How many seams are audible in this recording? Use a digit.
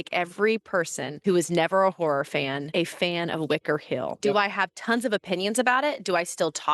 3